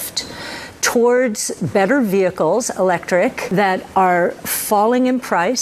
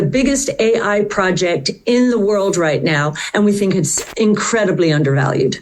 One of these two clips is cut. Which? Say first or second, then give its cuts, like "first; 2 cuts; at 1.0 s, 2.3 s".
first; 1 cut; at 3.5 s